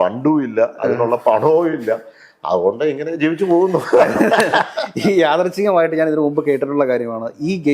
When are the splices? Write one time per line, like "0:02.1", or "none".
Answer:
none